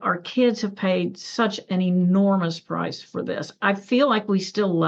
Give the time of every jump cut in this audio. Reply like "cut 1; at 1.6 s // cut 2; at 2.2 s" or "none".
none